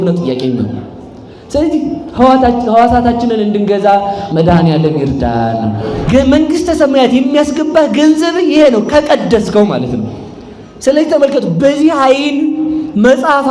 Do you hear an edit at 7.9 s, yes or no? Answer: no